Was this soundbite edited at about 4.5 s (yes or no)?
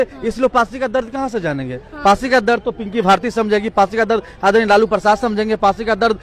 no